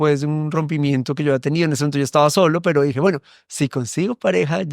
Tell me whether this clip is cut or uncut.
uncut